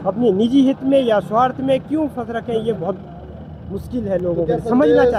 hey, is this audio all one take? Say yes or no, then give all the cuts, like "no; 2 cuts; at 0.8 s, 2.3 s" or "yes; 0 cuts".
yes; 0 cuts